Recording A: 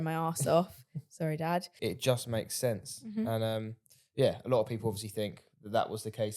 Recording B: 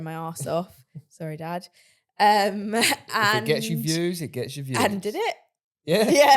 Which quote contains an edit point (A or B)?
A